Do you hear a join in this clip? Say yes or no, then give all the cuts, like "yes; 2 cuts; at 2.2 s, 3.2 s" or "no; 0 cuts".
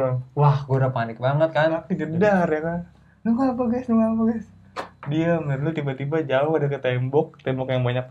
yes; 1 cut; at 1.7 s